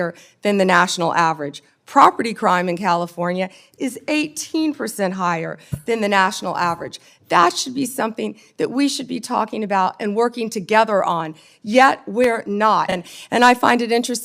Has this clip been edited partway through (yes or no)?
yes